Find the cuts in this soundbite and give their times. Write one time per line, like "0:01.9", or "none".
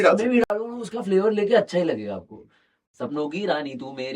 0:02.8